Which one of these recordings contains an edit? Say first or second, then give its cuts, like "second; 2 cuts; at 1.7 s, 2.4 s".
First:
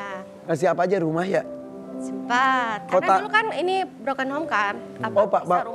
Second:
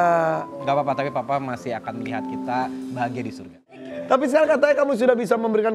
second; 1 cut; at 3.7 s